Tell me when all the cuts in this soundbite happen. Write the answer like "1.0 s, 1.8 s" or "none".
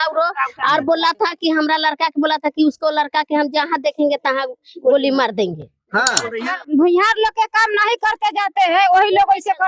6.3 s